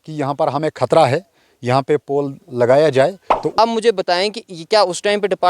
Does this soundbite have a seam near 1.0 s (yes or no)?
no